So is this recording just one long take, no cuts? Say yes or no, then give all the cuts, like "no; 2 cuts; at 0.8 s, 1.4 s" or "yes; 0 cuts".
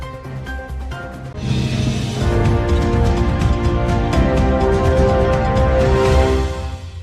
yes; 0 cuts